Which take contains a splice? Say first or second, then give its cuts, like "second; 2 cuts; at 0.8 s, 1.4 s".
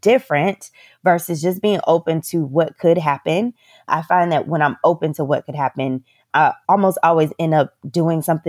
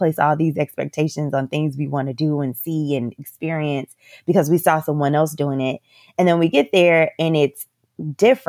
first; 2 cuts; at 3.9 s, 6.3 s